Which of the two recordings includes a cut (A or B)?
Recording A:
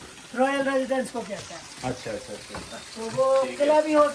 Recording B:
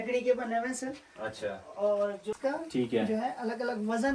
B